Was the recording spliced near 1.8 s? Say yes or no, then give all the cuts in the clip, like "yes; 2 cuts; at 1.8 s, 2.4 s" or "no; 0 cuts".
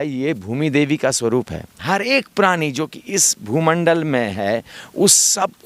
yes; 1 cut; at 1.8 s